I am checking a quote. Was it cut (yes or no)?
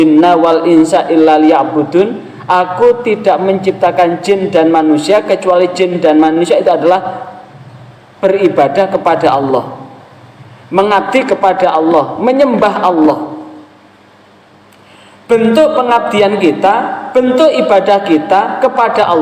no